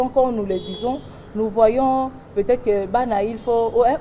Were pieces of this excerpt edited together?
no; 0 cuts

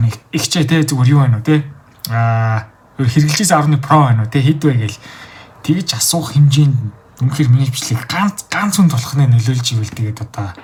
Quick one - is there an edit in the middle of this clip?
no; 0 cuts

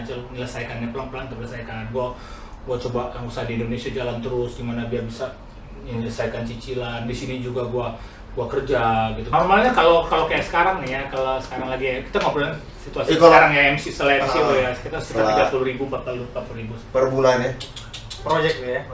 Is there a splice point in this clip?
yes; 1 cut; at 9.2 s

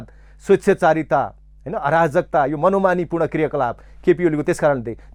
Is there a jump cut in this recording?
no; 0 cuts

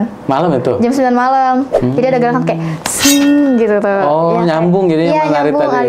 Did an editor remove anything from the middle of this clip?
yes; 1 cut; at 1.7 s

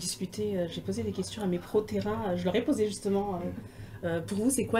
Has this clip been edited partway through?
no; 0 cuts

